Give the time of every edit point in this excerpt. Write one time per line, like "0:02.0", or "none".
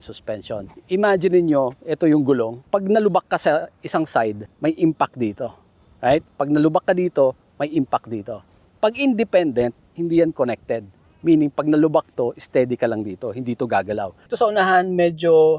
0:02.6
0:04.5
0:14.2